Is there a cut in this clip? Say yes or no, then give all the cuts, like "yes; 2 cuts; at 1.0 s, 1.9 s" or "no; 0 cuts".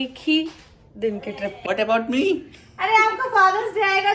yes; 1 cut; at 1.6 s